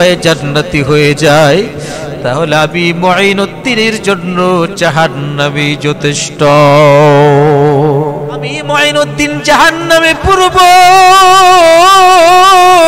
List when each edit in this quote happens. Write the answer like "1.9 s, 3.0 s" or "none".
8.7 s